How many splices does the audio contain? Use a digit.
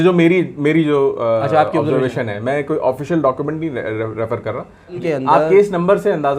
1